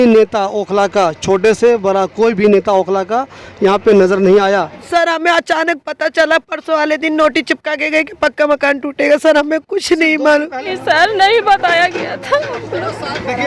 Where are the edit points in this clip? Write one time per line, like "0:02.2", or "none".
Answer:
0:04.8
0:10.7